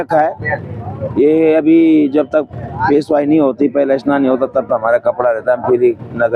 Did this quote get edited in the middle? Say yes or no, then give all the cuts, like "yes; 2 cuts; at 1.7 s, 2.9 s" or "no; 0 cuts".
no; 0 cuts